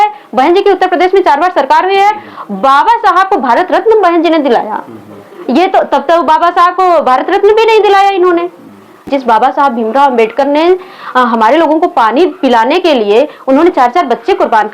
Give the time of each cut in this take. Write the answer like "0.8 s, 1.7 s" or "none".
9.1 s